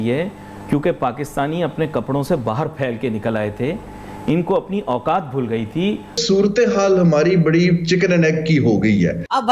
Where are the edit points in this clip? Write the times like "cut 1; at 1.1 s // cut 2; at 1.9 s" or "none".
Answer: cut 1; at 6.1 s